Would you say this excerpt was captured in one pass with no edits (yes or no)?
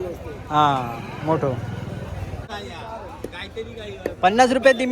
no